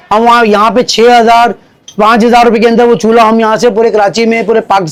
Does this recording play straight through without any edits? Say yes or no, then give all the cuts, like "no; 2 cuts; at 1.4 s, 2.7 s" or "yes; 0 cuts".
yes; 0 cuts